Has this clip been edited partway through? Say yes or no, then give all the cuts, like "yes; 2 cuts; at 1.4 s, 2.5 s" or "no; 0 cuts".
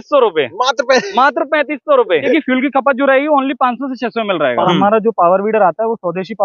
yes; 2 cuts; at 2.3 s, 4.6 s